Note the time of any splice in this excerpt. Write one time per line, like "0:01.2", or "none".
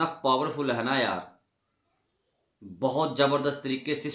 none